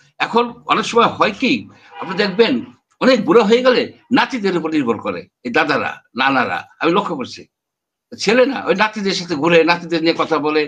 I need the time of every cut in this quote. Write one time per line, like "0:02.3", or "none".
none